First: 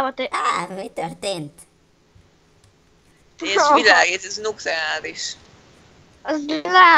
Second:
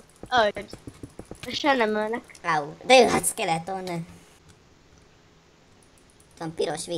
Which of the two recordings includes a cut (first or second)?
second